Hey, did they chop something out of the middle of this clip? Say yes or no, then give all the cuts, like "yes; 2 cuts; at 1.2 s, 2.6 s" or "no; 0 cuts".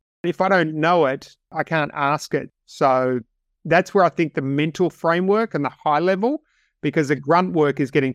yes; 1 cut; at 2.5 s